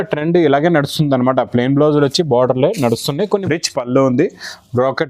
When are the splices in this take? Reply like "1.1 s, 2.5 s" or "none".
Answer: 3.2 s